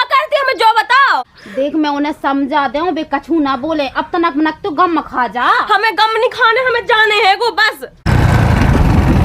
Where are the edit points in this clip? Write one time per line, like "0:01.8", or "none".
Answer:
0:01.4
0:08.1